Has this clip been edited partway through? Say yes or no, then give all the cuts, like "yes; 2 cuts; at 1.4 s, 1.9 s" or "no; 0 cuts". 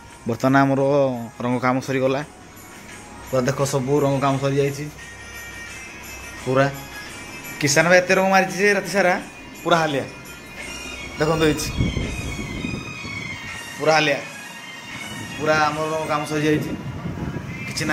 no; 0 cuts